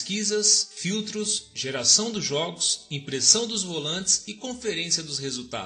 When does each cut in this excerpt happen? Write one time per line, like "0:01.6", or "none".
0:04.2